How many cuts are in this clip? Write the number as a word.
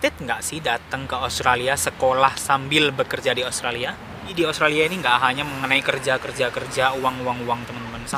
one